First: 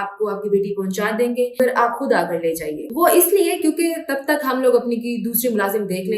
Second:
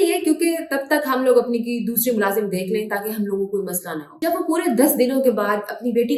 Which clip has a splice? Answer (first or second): first